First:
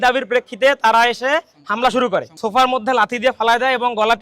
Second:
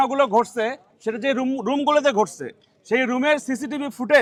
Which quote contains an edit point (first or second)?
first